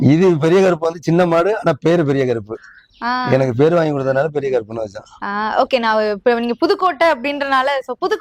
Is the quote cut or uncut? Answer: uncut